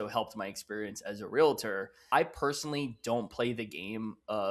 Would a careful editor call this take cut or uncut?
cut